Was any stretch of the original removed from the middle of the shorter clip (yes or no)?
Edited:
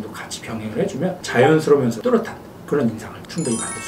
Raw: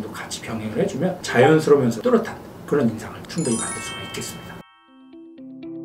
no